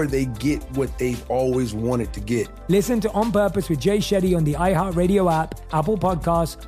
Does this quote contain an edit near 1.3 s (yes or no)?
no